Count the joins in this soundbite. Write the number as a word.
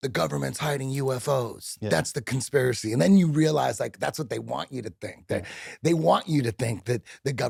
zero